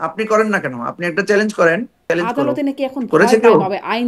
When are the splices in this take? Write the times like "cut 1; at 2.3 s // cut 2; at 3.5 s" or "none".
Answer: cut 1; at 2.0 s